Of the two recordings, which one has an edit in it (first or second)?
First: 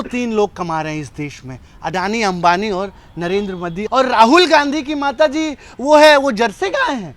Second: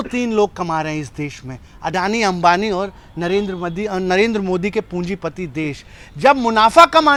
first